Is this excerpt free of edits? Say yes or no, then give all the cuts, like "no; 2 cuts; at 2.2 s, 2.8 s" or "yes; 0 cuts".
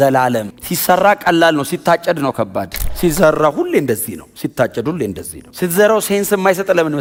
yes; 0 cuts